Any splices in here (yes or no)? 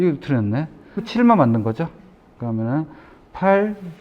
yes